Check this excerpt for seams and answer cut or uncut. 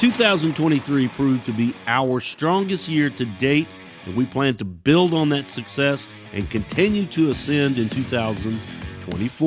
uncut